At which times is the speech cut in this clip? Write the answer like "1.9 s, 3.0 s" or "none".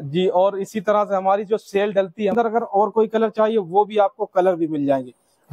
2.5 s